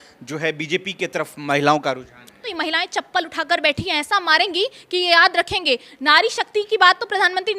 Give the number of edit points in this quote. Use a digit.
1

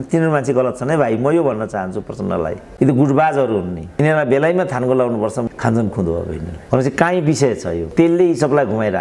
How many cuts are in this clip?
5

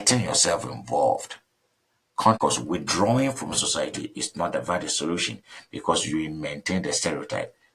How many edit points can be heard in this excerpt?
1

